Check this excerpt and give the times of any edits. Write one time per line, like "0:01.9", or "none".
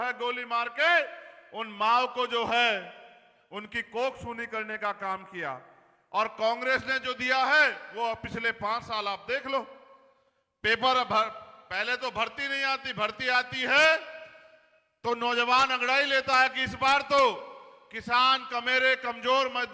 none